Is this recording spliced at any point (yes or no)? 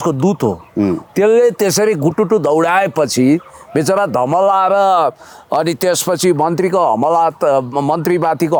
no